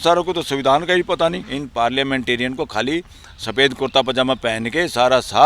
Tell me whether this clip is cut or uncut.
cut